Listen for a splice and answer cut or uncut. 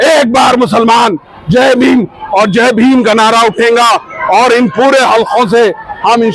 uncut